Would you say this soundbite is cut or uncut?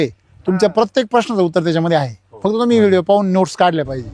uncut